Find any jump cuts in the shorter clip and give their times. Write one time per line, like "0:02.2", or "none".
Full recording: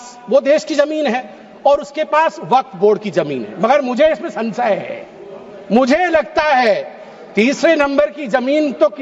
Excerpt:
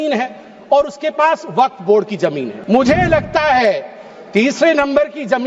0:02.5